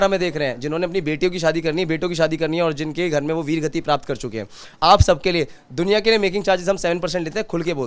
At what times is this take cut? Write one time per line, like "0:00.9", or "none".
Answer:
none